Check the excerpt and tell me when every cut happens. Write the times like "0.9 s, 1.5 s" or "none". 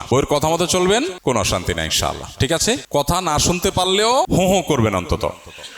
1.2 s, 2.8 s, 4.3 s